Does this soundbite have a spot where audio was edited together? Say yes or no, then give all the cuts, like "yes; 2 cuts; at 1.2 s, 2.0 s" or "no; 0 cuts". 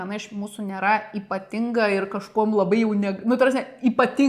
no; 0 cuts